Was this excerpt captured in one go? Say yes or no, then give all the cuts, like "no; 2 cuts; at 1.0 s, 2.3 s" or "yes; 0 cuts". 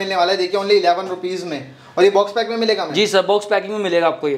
yes; 0 cuts